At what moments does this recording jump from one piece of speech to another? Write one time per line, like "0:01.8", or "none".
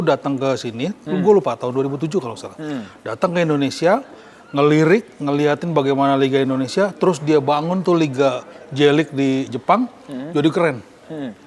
none